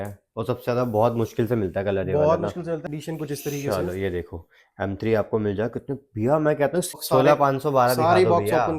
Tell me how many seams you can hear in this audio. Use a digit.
2